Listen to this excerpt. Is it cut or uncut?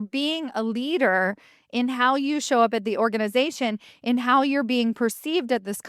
uncut